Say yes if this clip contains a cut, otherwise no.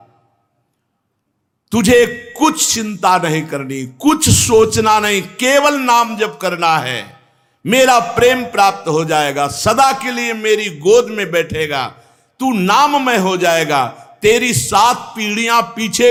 no